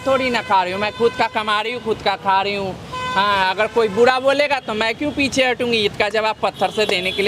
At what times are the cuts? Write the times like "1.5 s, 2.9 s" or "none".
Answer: none